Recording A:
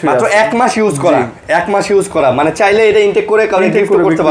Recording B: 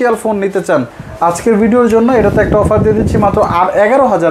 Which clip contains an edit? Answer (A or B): B